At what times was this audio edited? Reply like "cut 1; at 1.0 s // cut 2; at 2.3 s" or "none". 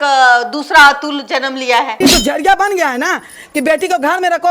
cut 1; at 1.9 s